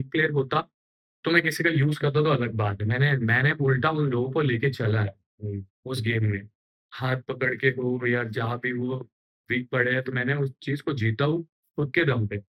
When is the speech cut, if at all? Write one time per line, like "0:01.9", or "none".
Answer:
none